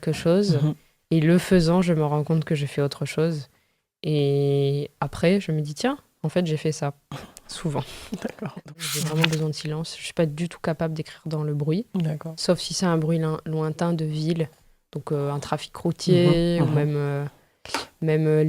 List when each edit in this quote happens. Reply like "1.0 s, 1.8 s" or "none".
8.6 s